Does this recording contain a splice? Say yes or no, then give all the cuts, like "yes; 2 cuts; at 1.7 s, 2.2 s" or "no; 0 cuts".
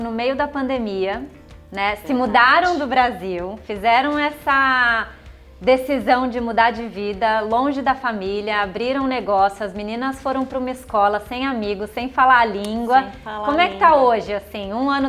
no; 0 cuts